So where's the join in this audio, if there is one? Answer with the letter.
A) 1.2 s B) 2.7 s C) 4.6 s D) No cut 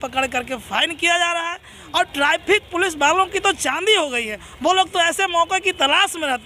D